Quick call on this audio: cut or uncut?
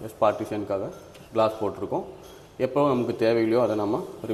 uncut